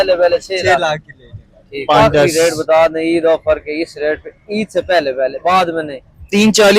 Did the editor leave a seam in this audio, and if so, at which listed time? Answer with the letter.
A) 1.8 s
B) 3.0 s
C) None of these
A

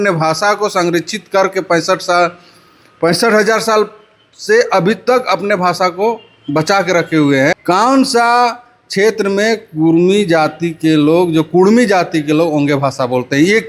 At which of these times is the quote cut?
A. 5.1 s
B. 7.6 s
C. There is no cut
B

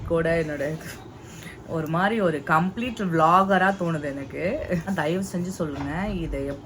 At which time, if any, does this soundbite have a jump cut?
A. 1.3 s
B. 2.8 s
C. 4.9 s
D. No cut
C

